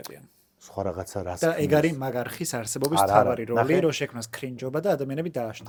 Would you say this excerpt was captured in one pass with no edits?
yes; 0 cuts

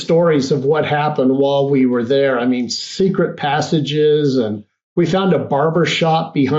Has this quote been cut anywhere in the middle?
no; 0 cuts

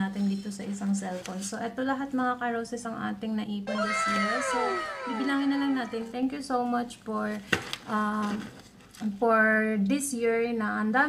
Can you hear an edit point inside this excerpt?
yes; 1 cut; at 6.1 s

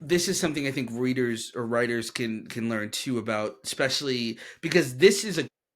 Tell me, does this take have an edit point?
no; 0 cuts

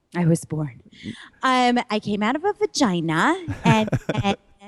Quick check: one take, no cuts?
yes; 0 cuts

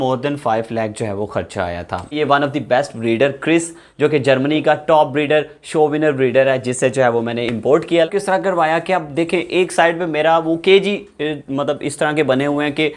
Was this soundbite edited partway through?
yes; 2 cuts; at 2.2 s, 8.1 s

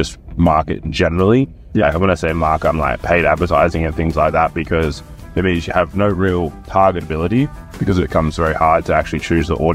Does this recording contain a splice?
no; 0 cuts

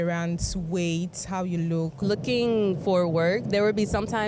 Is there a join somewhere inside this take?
yes; 1 cut; at 2.0 s

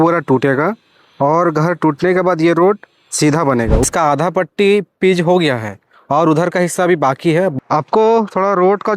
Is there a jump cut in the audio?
yes; 2 cuts; at 3.8 s, 7.5 s

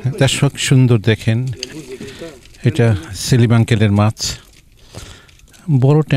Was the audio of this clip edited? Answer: no; 0 cuts

